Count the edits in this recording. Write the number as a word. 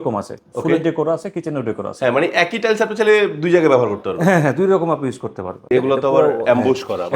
one